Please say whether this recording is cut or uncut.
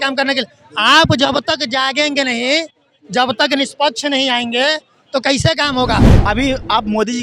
cut